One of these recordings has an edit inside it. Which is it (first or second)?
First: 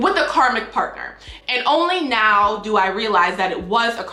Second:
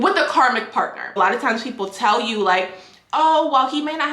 second